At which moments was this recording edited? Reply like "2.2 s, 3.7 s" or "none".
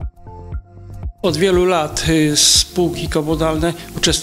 1.1 s